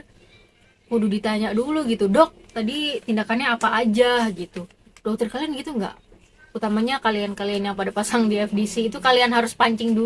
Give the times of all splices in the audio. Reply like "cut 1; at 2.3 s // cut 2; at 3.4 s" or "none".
none